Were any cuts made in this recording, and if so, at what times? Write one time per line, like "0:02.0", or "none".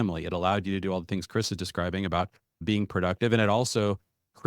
0:02.6